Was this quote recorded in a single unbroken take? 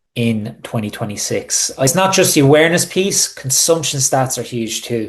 no; 1 cut; at 1.9 s

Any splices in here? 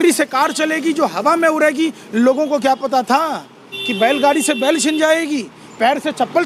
no; 0 cuts

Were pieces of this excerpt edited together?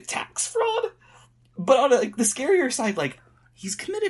no; 0 cuts

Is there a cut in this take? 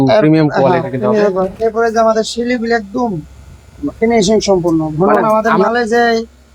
yes; 1 cut; at 5.2 s

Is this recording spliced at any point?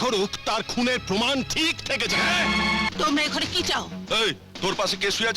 yes; 1 cut; at 2.9 s

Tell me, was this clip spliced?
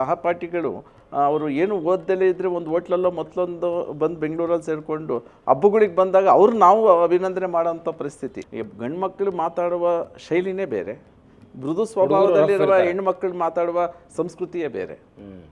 yes; 1 cut; at 8.4 s

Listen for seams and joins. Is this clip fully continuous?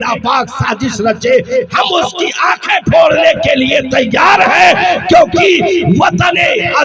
no; 1 cut; at 4.8 s

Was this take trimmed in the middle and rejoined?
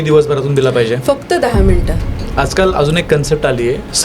yes; 1 cut; at 2.1 s

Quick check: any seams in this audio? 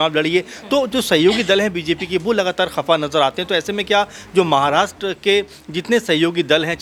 no; 0 cuts

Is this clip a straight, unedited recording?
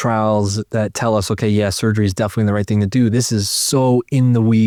yes; 0 cuts

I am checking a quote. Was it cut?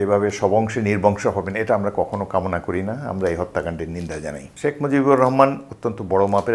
yes; 1 cut; at 4.5 s

